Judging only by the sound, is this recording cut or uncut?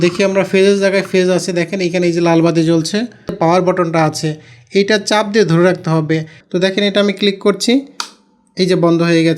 cut